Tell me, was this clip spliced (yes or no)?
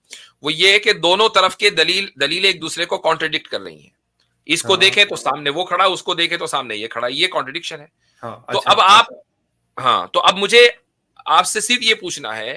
no